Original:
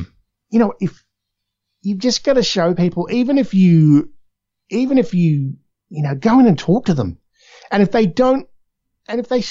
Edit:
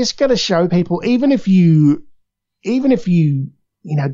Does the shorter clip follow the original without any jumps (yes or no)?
yes